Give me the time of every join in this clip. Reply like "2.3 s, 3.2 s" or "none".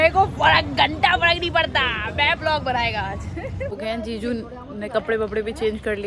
3.8 s